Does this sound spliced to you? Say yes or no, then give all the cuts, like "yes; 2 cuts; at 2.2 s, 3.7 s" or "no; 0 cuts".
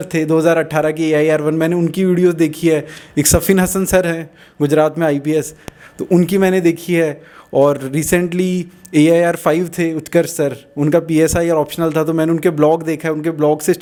no; 0 cuts